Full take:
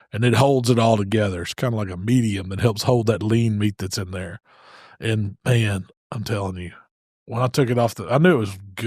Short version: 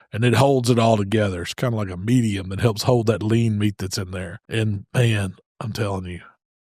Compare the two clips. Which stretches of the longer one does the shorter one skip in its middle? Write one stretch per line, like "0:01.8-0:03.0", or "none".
0:04.4-0:04.9